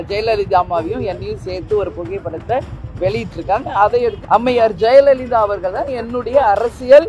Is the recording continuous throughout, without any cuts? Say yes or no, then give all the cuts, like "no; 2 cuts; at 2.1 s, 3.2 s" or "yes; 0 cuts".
no; 1 cut; at 4.2 s